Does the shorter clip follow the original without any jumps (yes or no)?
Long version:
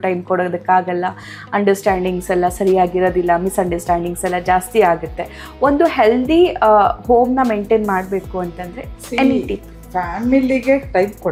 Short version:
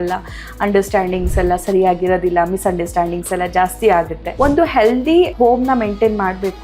no